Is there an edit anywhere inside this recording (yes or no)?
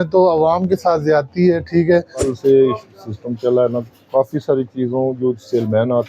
yes